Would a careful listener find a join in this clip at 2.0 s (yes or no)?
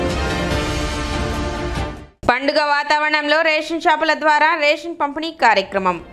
yes